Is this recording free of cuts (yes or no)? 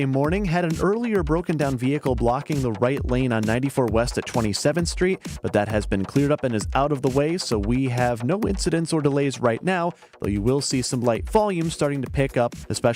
yes